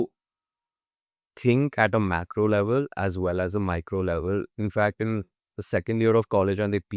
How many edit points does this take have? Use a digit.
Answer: 0